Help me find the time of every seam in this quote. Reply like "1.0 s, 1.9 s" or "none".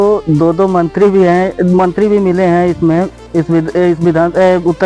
none